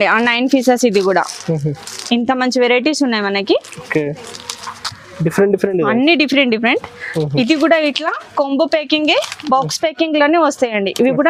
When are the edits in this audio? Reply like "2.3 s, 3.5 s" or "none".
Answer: none